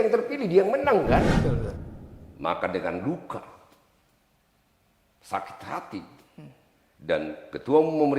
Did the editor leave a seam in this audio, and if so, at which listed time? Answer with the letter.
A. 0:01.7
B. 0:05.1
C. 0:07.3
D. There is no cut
A